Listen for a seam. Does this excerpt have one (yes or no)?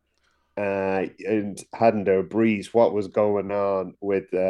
no